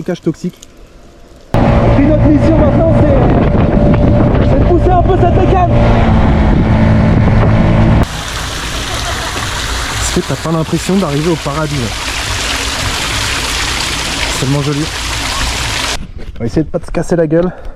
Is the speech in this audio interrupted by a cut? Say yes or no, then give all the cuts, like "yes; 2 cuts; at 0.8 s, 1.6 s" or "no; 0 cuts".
yes; 3 cuts; at 1.5 s, 8.0 s, 16.0 s